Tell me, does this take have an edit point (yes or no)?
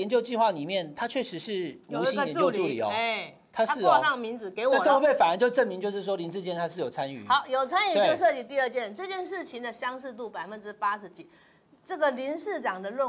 no